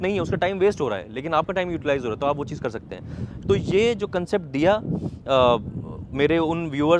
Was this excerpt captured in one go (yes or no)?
yes